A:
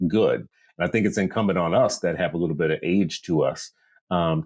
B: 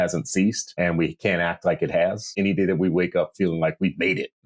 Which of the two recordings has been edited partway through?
B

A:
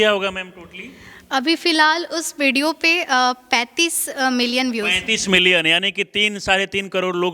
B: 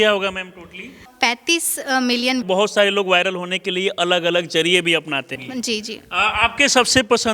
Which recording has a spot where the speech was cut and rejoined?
B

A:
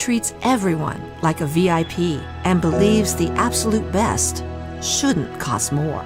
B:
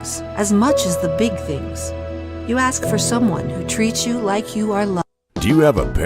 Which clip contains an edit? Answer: B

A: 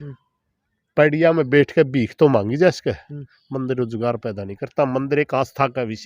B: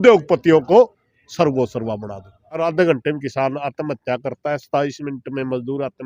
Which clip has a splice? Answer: B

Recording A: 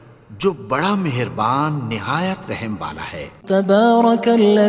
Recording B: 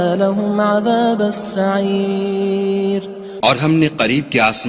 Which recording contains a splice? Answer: A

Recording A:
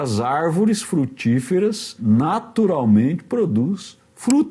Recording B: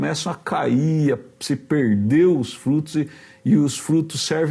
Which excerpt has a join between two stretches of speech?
A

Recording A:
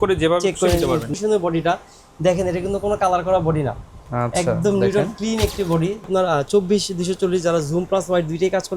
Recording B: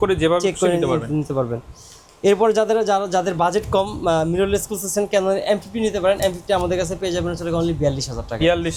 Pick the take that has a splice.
A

